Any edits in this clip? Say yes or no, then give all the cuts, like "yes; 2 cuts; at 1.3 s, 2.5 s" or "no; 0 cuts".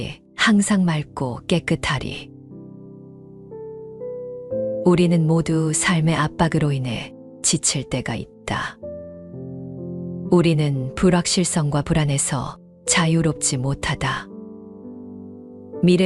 yes; 2 cuts; at 2.5 s, 4.2 s